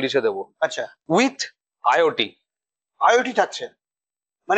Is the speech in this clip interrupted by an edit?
no; 0 cuts

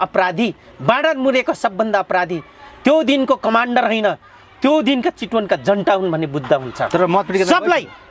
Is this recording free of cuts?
yes; 0 cuts

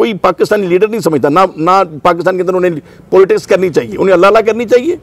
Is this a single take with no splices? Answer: yes; 0 cuts

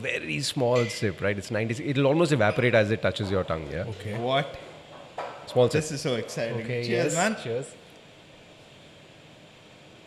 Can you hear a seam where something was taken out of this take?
no; 0 cuts

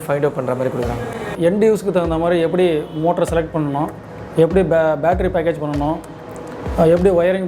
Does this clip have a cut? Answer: yes; 1 cut; at 1.3 s

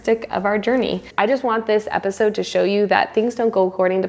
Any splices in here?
yes; 1 cut; at 1.0 s

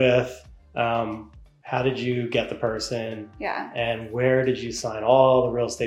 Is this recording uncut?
yes; 0 cuts

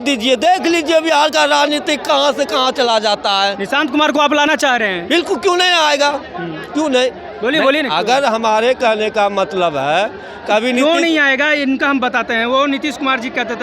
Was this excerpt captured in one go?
yes; 0 cuts

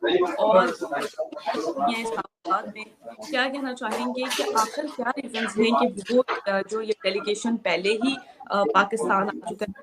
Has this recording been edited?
no; 0 cuts

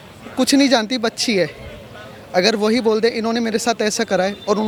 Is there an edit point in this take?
no; 0 cuts

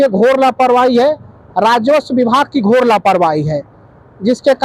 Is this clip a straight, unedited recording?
yes; 0 cuts

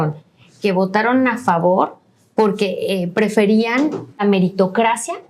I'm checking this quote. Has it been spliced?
yes; 1 cut; at 4.2 s

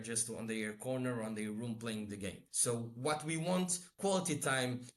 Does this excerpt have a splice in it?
yes; 2 cuts; at 2.5 s, 3.9 s

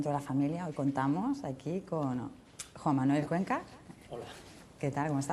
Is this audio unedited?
no; 1 cut; at 1.0 s

